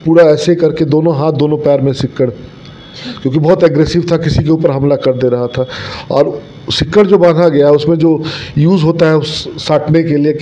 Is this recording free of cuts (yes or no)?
yes